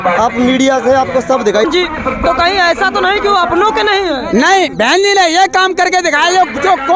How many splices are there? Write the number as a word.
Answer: one